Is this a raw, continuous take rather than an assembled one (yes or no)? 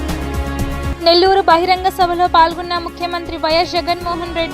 no